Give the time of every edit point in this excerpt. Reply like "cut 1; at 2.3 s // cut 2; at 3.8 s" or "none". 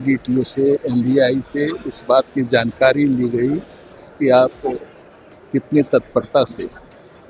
none